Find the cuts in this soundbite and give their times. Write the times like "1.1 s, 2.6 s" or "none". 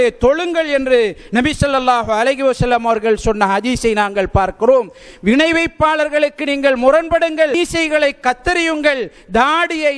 7.6 s